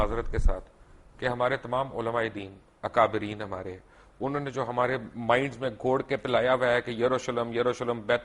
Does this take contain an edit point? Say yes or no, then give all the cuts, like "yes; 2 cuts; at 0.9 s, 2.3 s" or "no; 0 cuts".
no; 0 cuts